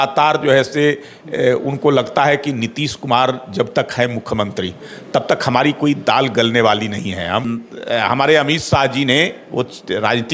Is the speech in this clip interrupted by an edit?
yes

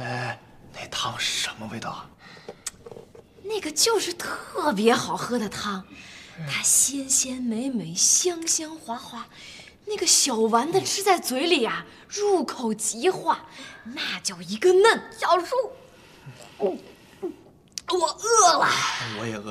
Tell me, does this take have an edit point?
no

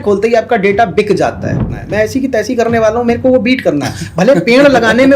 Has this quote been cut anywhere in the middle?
yes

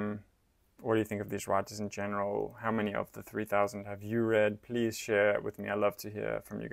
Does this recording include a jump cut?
no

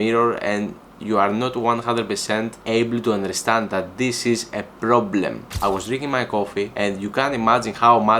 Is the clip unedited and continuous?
no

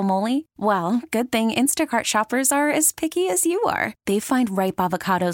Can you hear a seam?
no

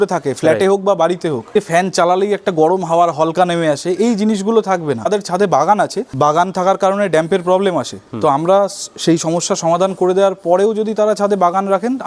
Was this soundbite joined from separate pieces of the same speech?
yes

